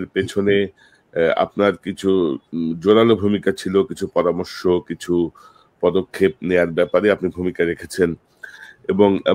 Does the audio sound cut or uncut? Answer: uncut